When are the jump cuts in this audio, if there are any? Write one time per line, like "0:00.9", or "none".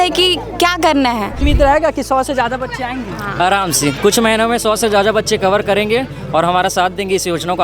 0:01.4